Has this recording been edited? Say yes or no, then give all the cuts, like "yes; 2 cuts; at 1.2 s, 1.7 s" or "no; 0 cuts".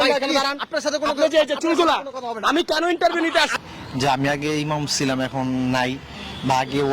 yes; 1 cut; at 3.6 s